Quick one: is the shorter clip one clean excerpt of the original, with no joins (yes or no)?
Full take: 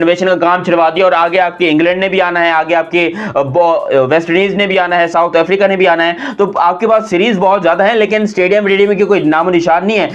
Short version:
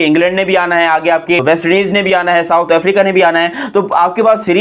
no